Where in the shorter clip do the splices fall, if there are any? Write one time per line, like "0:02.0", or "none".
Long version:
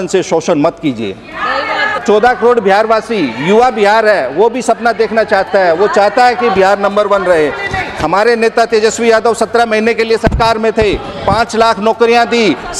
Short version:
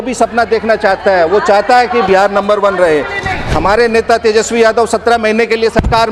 none